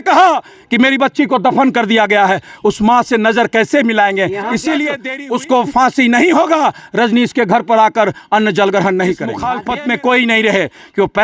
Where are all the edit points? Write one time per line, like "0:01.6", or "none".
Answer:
0:05.1
0:09.4